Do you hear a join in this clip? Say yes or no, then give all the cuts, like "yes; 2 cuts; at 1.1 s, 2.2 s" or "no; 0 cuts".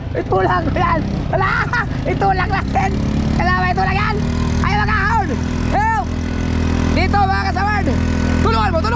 no; 0 cuts